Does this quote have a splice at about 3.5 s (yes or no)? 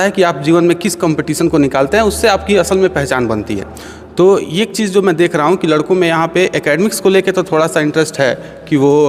no